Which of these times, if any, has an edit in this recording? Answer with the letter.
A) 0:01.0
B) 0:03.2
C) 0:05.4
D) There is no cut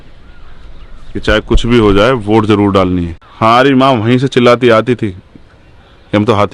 B